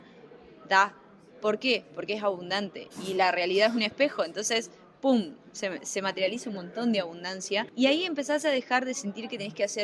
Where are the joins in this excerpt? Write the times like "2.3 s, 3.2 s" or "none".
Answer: 7.7 s

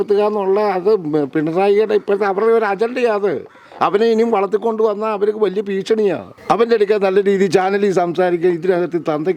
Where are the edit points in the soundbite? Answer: 6.3 s

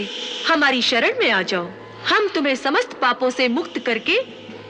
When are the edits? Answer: none

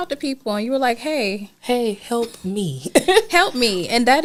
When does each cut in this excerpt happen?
none

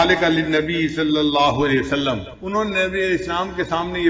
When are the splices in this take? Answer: 2.3 s

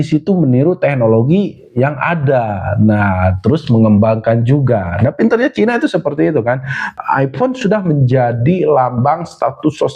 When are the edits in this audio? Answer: 6.9 s

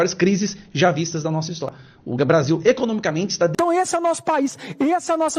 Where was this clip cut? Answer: 1.7 s, 3.5 s

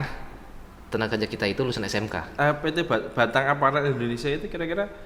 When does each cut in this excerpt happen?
2.3 s

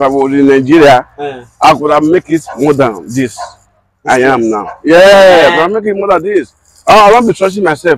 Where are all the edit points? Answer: none

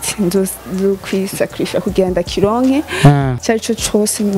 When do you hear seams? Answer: 3.3 s

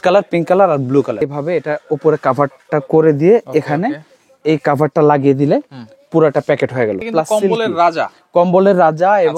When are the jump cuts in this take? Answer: 1.2 s, 7.0 s

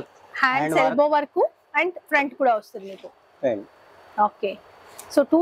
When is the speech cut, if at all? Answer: none

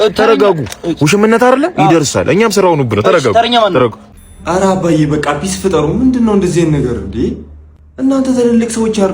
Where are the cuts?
4.1 s

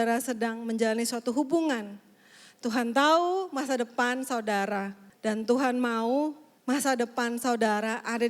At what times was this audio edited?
5.0 s, 6.5 s

